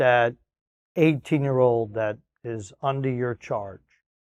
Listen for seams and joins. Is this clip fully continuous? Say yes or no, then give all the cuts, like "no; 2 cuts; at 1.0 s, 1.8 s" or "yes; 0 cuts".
yes; 0 cuts